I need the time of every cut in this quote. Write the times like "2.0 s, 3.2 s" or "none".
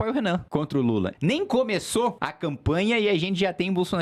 1.0 s, 2.3 s